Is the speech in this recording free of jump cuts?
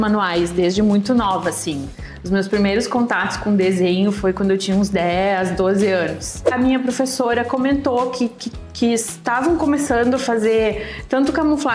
no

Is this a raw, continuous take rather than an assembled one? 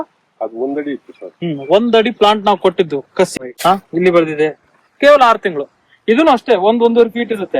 no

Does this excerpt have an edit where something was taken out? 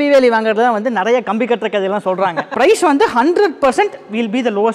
yes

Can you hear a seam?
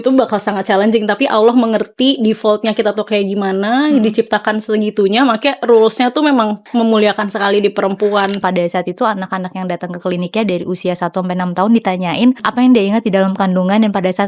yes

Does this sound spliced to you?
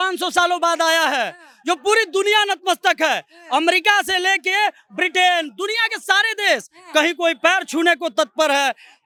no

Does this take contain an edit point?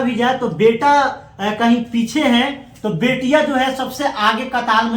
no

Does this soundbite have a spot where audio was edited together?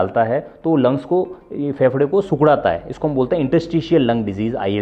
no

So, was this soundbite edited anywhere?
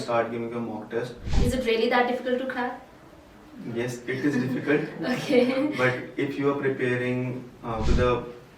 yes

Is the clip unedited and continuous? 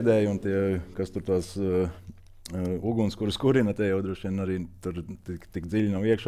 yes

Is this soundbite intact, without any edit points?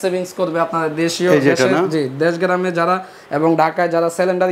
yes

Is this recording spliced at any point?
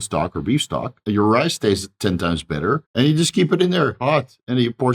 yes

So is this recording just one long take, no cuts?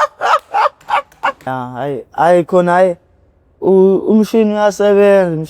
no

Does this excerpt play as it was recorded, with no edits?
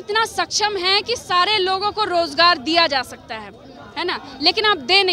yes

